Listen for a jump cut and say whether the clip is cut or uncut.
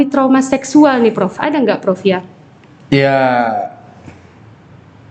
uncut